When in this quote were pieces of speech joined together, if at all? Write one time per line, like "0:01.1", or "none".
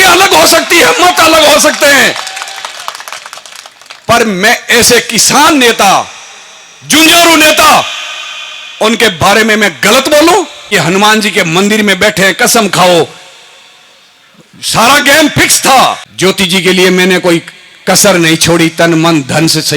0:10.7
0:16.1